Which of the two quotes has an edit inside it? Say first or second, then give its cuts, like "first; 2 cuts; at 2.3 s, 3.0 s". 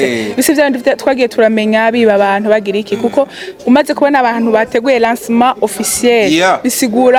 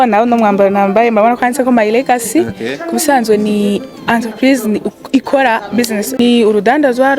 second; 1 cut; at 6.2 s